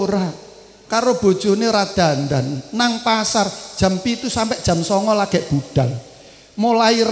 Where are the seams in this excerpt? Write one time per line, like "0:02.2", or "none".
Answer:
none